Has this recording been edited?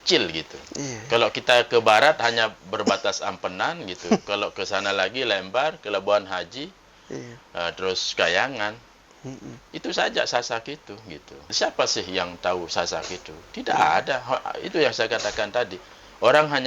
yes; 1 cut; at 11.5 s

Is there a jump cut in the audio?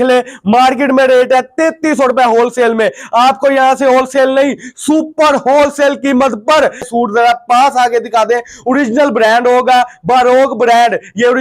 yes; 1 cut; at 6.9 s

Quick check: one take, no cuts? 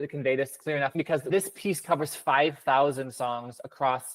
no; 1 cut; at 0.9 s

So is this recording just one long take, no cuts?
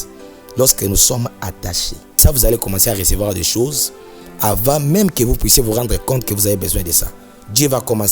no; 1 cut; at 2.2 s

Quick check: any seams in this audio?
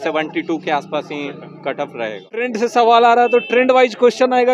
yes; 1 cut; at 2.5 s

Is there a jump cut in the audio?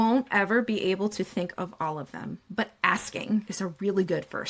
yes; 2 cuts; at 2.4 s, 3.5 s

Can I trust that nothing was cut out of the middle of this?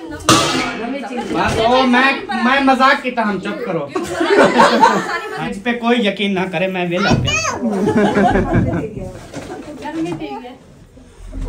no; 1 cut; at 5.5 s

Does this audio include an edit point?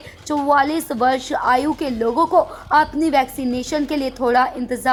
no; 0 cuts

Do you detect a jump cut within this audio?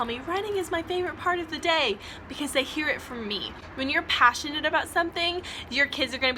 no; 0 cuts

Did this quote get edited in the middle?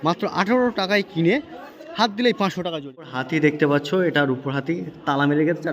yes; 1 cut; at 2.8 s

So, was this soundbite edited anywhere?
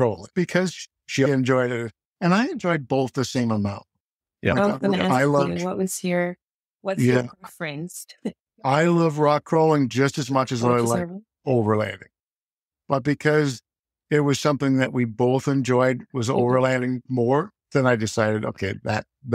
no; 0 cuts

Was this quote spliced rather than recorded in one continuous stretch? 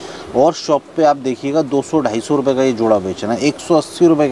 no; 0 cuts

